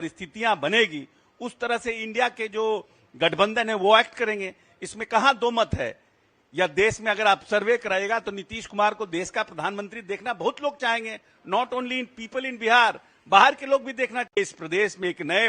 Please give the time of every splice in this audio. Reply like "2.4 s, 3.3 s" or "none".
14.3 s